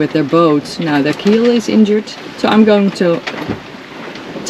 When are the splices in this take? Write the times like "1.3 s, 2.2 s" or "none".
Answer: 2.2 s